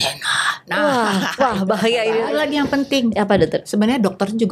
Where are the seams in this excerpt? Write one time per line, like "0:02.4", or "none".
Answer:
0:02.3